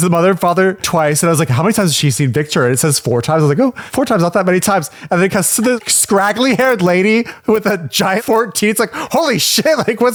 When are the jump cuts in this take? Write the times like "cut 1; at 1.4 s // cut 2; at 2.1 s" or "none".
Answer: none